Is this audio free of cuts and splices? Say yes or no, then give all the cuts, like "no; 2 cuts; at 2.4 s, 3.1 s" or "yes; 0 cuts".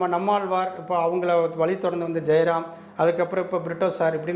yes; 0 cuts